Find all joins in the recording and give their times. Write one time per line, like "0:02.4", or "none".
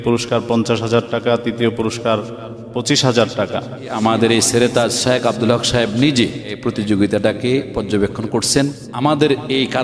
0:04.0
0:06.6
0:08.8